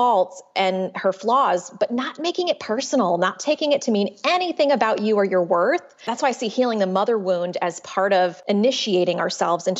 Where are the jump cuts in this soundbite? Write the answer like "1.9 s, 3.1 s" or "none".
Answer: 5.9 s, 8.4 s